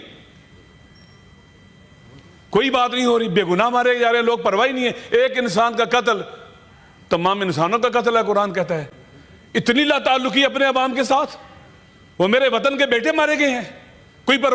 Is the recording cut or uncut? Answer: uncut